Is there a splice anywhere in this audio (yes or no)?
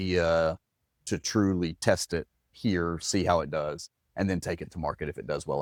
no